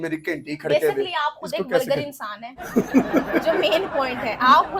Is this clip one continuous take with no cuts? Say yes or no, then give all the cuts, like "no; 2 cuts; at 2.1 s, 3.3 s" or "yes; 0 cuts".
yes; 0 cuts